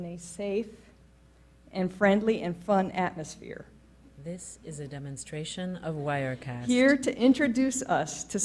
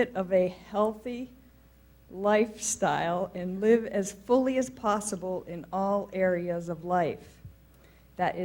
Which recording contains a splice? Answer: first; 2 cuts; at 4.2 s, 6.6 s

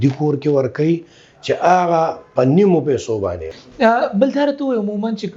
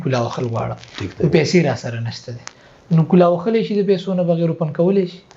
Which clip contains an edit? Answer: first; 1 cut; at 3.5 s

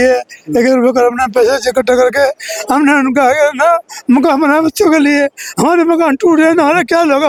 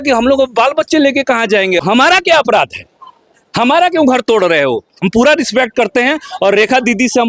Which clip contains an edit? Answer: second; 2 cuts; at 1.8 s, 5.0 s

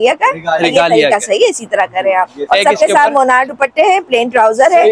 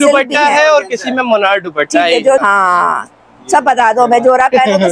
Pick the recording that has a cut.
second; 1 cut; at 2.4 s

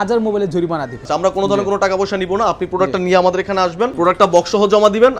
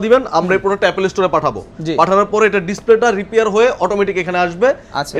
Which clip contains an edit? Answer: first; 1 cut; at 1.1 s

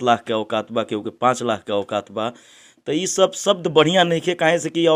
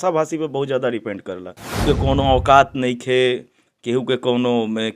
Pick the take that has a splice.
second; 1 cut; at 1.8 s

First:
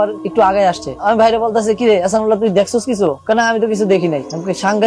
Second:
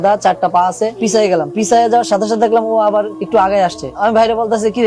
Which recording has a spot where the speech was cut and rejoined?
second; 1 cut; at 1.0 s

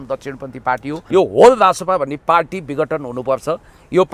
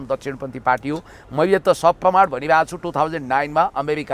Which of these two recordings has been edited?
first; 1 cut; at 1.0 s

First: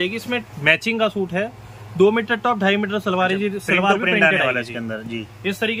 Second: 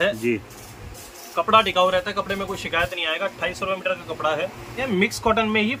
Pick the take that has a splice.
second; 1 cut; at 4.8 s

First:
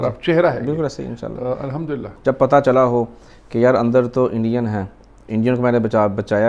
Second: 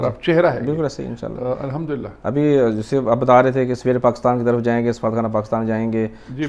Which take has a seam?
first; 1 cut; at 2.1 s

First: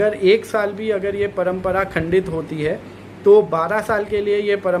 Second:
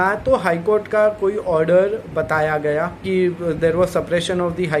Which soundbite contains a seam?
second; 1 cut; at 3.0 s

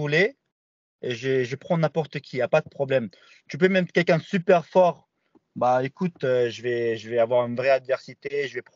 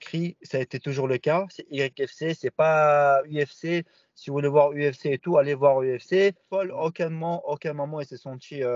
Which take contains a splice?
second; 1 cut; at 6.7 s

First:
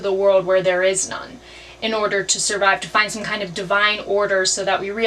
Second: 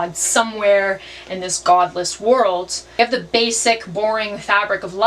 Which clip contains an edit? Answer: second; 1 cut; at 2.8 s

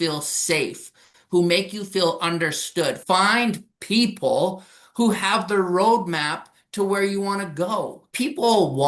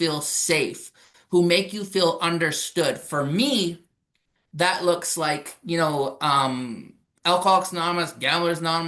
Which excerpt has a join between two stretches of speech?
first; 2 cuts; at 3.0 s, 8.0 s

